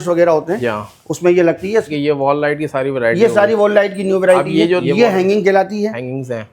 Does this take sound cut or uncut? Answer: cut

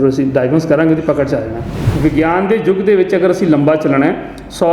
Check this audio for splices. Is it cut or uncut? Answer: cut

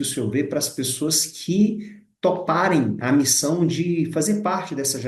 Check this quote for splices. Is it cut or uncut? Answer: uncut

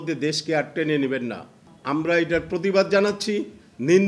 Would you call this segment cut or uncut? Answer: cut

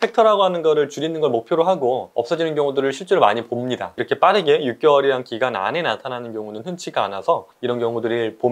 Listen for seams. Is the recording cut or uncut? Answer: cut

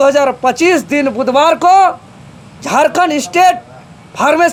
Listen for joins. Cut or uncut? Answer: uncut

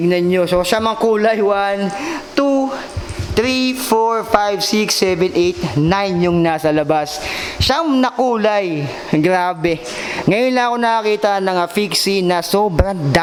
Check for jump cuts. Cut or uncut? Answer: uncut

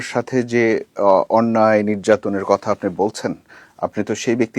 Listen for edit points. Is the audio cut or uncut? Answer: uncut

